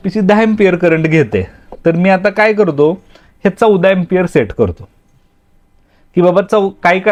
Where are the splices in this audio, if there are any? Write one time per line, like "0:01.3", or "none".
none

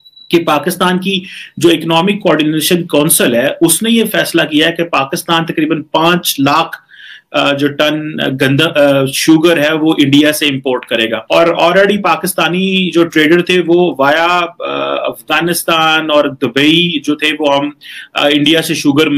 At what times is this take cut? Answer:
none

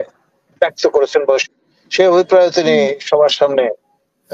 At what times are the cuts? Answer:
0:01.4

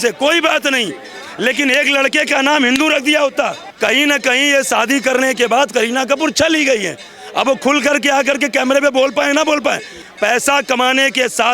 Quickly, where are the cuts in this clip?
0:03.6
0:10.0

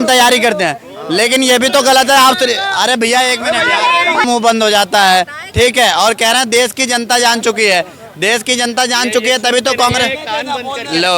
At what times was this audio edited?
0:04.2

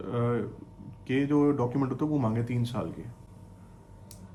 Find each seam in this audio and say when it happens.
none

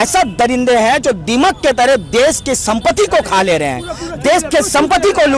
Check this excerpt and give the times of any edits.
none

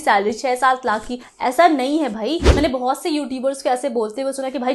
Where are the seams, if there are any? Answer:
0:02.5

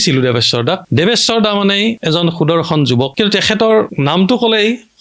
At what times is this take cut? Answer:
0:00.8
0:02.0
0:03.1
0:03.9

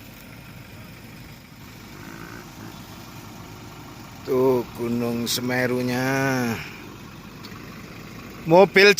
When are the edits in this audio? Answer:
0:01.5

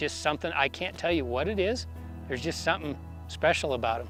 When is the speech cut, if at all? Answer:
none

